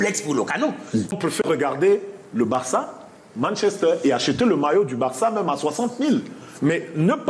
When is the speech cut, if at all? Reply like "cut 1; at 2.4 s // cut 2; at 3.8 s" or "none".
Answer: cut 1; at 1.1 s